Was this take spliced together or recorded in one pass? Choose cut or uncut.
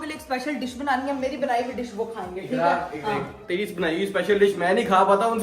uncut